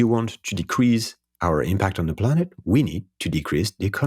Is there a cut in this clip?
no; 0 cuts

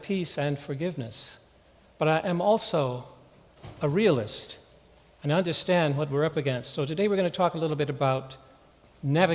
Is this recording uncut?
yes; 0 cuts

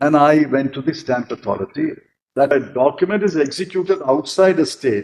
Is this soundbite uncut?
no; 1 cut; at 2.5 s

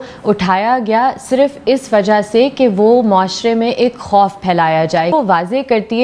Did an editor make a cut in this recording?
yes; 1 cut; at 5.1 s

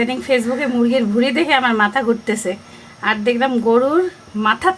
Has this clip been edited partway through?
no; 0 cuts

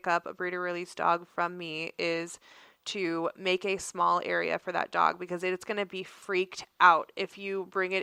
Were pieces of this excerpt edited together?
no; 0 cuts

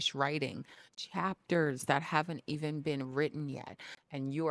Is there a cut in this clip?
no; 0 cuts

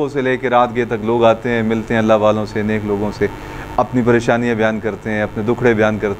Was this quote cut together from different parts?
no; 0 cuts

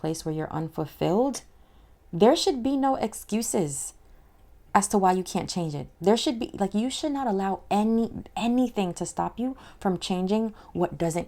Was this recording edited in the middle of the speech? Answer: no; 0 cuts

